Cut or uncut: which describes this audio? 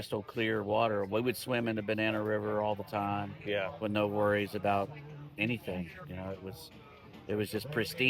uncut